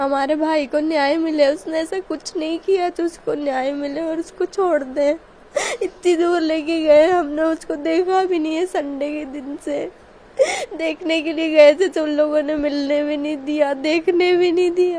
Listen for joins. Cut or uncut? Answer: uncut